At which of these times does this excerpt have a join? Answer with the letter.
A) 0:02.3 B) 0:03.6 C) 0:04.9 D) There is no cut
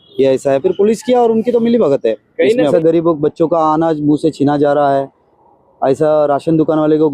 A